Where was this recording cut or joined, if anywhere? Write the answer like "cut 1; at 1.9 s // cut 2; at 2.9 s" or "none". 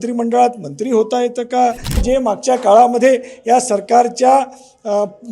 cut 1; at 2.0 s